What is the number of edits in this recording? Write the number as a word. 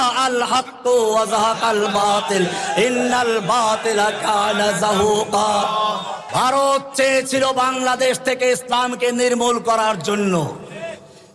one